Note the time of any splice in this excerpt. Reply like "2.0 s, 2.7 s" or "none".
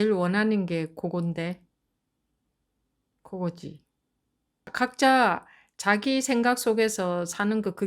4.7 s